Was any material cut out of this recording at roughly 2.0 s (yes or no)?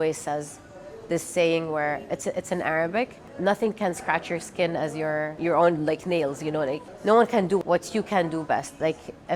no